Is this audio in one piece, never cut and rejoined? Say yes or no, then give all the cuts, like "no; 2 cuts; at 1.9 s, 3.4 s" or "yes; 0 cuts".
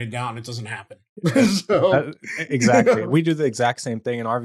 yes; 0 cuts